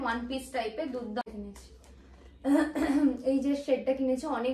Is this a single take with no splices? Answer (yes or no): no